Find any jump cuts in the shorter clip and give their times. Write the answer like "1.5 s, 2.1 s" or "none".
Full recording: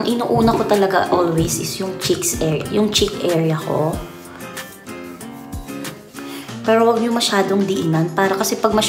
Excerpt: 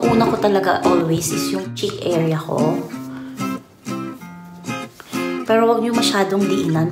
1.8 s